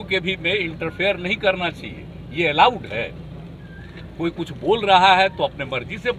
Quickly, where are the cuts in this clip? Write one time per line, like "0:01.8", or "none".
none